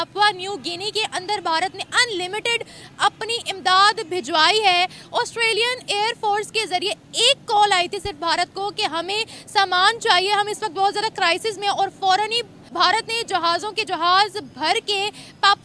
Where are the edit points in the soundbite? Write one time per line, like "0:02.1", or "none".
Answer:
none